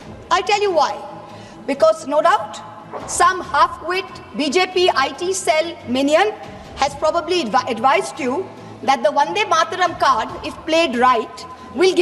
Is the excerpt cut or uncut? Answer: uncut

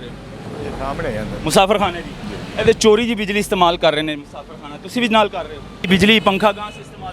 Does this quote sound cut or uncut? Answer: cut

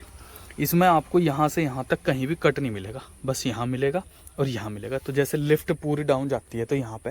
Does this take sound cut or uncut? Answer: uncut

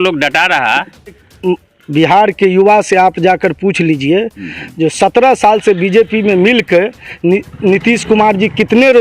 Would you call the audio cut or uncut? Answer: cut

